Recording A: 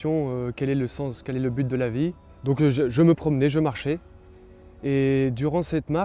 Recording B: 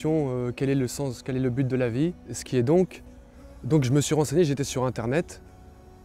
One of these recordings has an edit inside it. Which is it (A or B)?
B